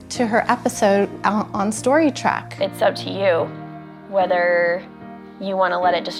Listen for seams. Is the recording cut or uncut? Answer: uncut